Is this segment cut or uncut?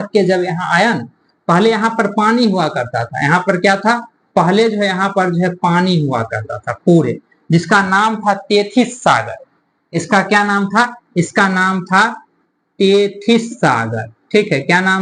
uncut